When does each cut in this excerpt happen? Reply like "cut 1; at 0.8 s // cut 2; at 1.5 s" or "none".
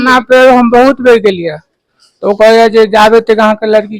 none